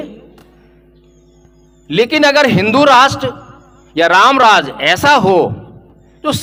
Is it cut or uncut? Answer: uncut